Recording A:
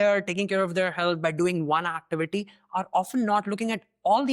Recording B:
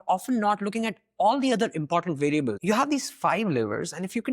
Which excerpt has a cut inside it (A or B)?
B